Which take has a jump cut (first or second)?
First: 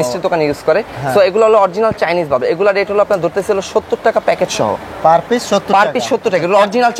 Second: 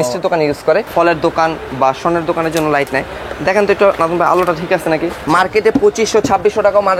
second